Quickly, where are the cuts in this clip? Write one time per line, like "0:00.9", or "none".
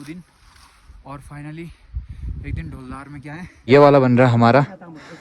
0:03.7